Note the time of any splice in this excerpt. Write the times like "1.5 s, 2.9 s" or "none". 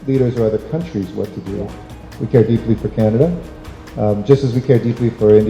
2.1 s

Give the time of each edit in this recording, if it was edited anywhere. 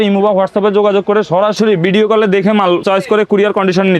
1.6 s, 2.8 s

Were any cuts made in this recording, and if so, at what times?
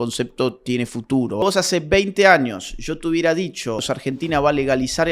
1.4 s, 3.9 s

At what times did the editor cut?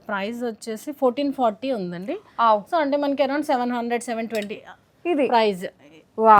none

